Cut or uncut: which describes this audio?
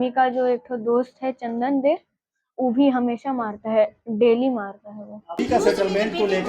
cut